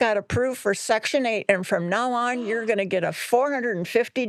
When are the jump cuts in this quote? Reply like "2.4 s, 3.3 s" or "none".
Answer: none